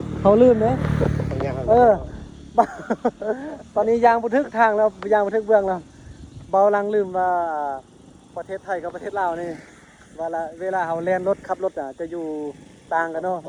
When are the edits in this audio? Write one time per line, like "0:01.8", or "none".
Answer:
none